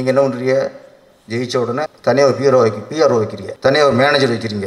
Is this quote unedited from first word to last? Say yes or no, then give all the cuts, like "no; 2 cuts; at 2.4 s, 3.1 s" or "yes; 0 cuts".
no; 2 cuts; at 1.9 s, 3.4 s